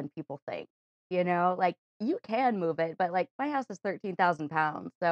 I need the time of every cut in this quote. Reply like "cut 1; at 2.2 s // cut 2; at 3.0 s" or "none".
none